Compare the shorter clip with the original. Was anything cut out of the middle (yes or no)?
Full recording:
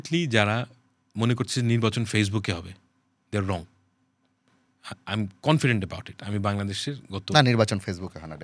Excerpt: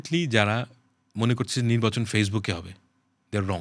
no